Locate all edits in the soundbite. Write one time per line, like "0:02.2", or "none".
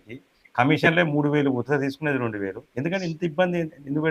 0:02.6